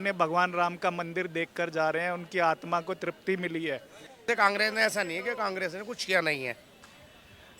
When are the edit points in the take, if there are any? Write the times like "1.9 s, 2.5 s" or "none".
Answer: 4.3 s